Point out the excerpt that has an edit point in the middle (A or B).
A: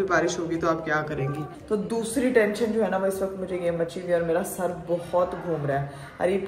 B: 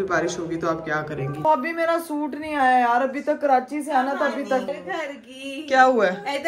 B